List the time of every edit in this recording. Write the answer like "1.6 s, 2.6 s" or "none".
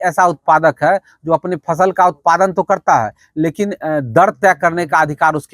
none